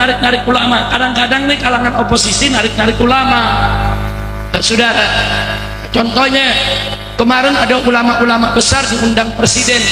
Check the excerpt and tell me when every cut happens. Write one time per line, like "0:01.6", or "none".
none